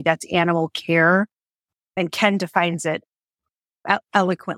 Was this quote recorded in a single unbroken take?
yes; 0 cuts

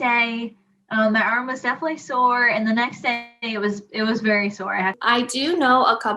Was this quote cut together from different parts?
yes; 1 cut; at 5.0 s

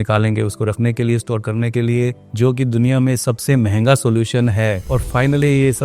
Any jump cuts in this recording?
yes; 1 cut; at 4.9 s

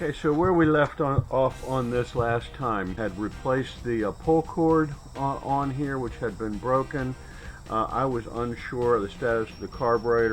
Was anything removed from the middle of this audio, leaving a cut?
yes; 1 cut; at 3.0 s

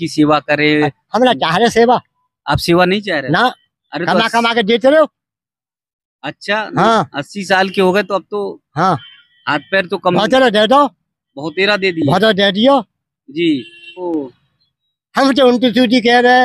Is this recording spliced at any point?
yes; 1 cut; at 14.0 s

